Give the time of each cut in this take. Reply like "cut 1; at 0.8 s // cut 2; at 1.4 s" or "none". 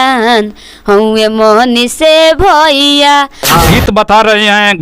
cut 1; at 3.6 s